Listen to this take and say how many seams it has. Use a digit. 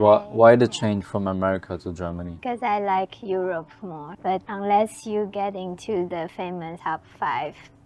3